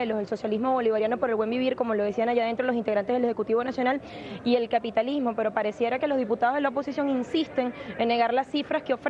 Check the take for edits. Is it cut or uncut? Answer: uncut